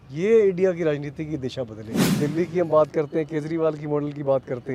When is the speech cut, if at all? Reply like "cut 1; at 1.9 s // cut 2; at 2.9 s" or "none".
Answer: cut 1; at 2.2 s